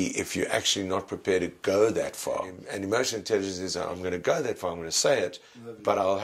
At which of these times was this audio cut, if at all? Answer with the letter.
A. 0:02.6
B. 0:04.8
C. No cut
A